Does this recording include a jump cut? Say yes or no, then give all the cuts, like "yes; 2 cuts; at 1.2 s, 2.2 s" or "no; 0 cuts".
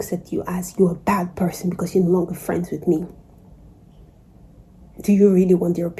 no; 0 cuts